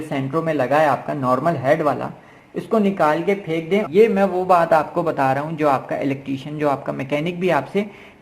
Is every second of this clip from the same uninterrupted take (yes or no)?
no